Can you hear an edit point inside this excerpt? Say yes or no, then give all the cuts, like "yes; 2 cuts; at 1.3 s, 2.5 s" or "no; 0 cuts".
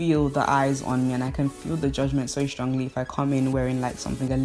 no; 0 cuts